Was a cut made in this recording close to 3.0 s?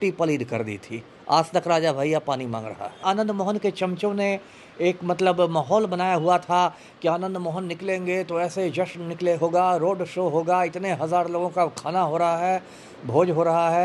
yes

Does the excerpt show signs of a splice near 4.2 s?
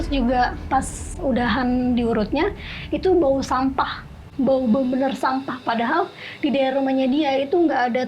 no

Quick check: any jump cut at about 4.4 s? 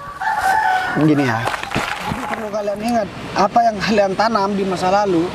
no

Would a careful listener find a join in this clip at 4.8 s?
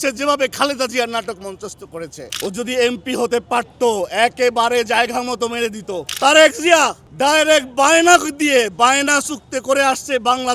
no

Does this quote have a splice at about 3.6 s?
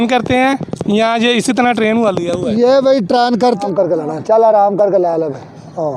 yes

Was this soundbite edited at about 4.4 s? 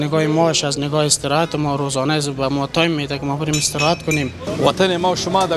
yes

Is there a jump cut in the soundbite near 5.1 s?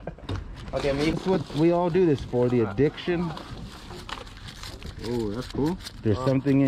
no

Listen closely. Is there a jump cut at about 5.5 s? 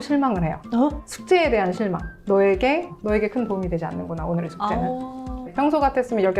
yes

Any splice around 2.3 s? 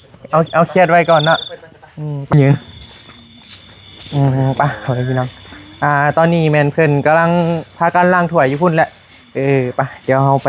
yes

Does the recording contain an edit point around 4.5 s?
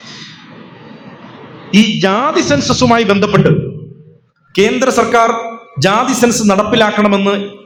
no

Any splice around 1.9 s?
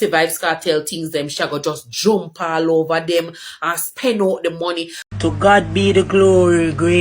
no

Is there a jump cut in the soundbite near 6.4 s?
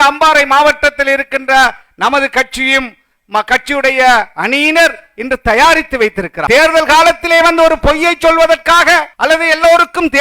yes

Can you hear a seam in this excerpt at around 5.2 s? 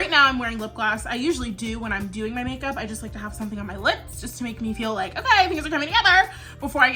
no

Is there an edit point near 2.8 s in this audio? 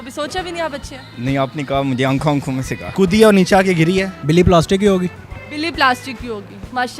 yes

